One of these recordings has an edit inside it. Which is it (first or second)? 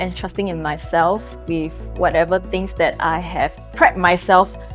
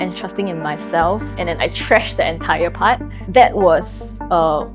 second